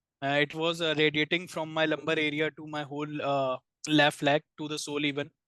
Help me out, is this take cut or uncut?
uncut